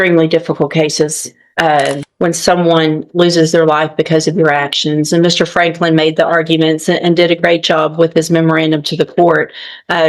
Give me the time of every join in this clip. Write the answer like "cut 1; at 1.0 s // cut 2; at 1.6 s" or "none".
cut 1; at 2.0 s